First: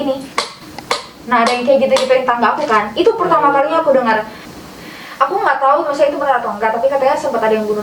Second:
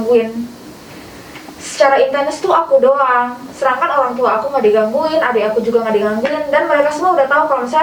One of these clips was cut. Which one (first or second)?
first